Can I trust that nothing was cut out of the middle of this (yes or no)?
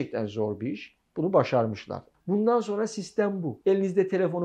no